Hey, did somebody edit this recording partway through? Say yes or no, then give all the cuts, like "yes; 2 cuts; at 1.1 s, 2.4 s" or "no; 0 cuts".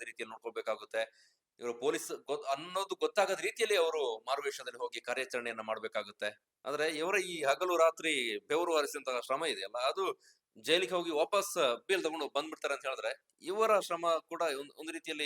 yes; 1 cut; at 6.5 s